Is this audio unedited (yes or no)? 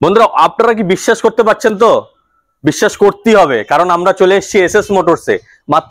yes